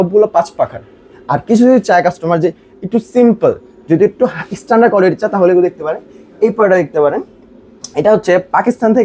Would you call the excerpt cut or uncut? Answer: uncut